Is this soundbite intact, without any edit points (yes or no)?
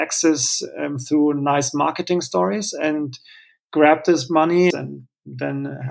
no